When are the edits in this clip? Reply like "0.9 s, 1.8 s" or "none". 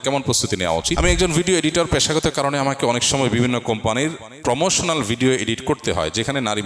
1.0 s